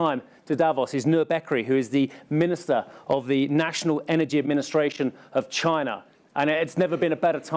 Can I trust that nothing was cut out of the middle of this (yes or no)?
no